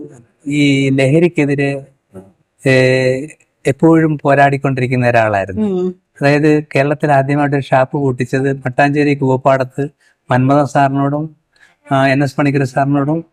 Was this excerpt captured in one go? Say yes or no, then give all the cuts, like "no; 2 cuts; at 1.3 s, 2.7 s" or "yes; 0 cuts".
yes; 0 cuts